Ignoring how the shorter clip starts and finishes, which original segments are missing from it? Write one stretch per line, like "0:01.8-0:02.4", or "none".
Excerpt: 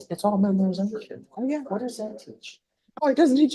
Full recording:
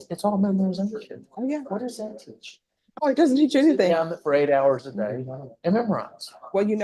none